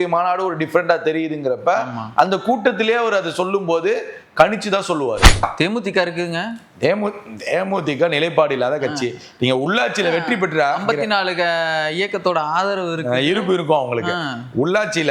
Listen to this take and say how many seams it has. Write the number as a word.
one